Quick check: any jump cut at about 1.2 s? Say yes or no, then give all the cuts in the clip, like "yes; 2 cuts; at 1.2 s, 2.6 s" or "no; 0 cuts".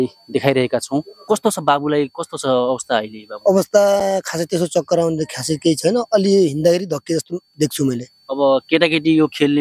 yes; 1 cut; at 1.2 s